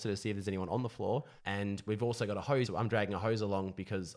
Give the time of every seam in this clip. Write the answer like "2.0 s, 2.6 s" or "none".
1.4 s, 2.7 s